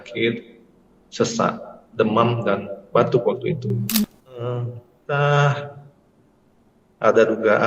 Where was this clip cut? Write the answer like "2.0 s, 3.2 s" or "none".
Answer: 4.1 s